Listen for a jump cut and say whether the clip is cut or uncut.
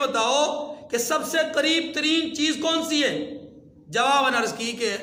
uncut